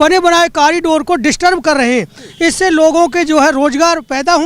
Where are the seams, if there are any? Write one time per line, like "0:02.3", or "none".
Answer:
none